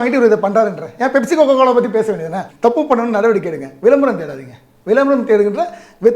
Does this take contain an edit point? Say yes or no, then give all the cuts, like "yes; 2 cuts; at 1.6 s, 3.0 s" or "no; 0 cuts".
yes; 1 cut; at 2.4 s